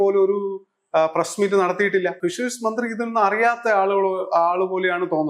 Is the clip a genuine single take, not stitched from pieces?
no; 1 cut; at 2.2 s

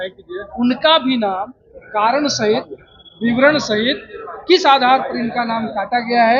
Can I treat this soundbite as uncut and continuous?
yes; 0 cuts

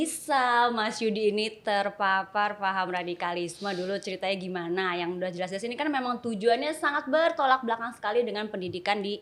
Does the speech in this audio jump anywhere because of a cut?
no; 0 cuts

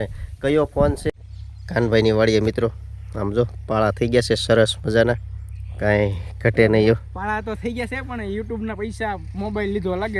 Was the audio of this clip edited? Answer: yes; 1 cut; at 1.1 s

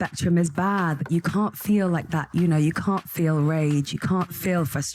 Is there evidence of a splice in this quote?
no; 0 cuts

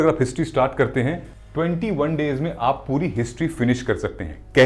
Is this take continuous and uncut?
no; 1 cut; at 1.3 s

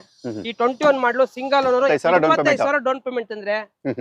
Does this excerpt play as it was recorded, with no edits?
no; 1 cut; at 1.9 s

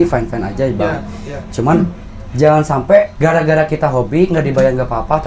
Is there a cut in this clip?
yes; 1 cut; at 3.1 s

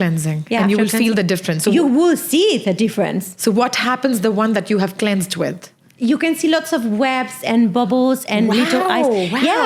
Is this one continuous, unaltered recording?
yes; 0 cuts

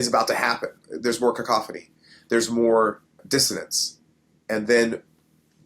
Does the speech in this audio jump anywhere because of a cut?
yes; 2 cuts; at 0.9 s, 3.1 s

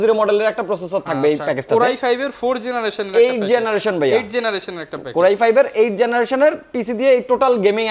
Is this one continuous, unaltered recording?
yes; 0 cuts

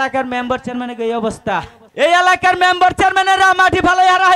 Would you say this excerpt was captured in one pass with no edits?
no; 1 cut; at 1.8 s

